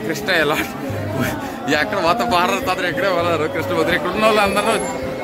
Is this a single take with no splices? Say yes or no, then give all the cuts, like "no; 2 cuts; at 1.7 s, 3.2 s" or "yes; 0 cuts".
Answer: yes; 0 cuts